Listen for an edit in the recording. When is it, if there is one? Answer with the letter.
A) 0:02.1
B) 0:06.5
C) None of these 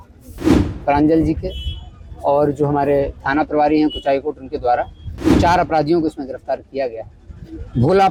C